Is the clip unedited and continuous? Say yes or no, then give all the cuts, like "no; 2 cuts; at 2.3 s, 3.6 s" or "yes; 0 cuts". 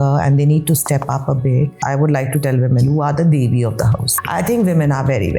no; 3 cuts; at 1.8 s, 2.8 s, 4.1 s